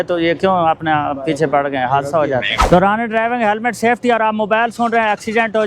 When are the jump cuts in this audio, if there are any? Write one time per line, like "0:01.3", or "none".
0:02.5